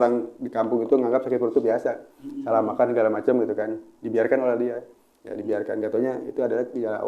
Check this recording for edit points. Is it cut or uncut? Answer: uncut